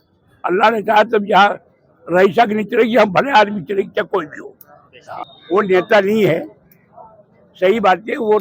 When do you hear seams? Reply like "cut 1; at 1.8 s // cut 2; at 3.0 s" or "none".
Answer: cut 1; at 5.2 s